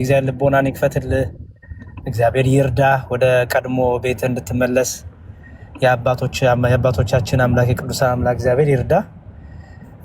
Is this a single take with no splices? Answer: yes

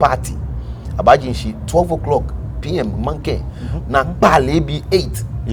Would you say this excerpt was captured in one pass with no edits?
yes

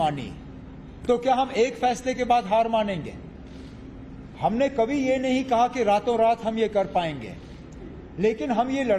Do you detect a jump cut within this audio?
no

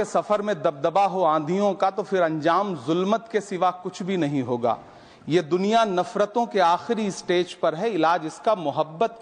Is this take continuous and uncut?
yes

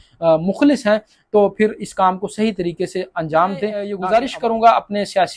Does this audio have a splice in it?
yes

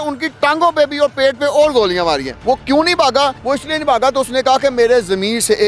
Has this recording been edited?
yes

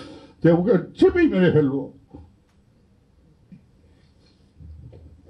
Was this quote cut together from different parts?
no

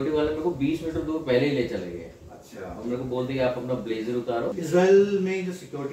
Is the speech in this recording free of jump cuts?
no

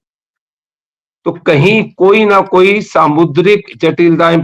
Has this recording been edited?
no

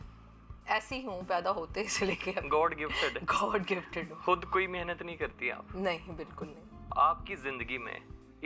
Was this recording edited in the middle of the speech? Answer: yes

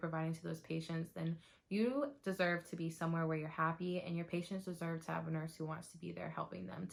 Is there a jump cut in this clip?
no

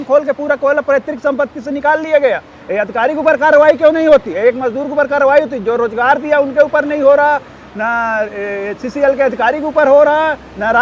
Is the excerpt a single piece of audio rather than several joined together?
yes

